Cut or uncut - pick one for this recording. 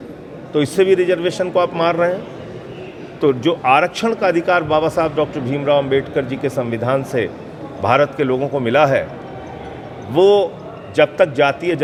uncut